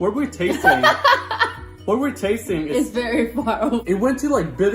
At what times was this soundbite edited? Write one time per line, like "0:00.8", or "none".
0:03.8